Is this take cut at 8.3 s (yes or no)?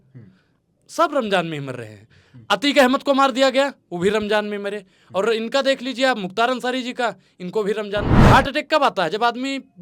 yes